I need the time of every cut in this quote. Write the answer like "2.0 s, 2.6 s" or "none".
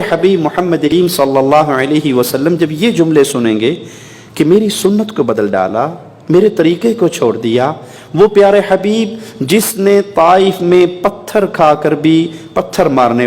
0.9 s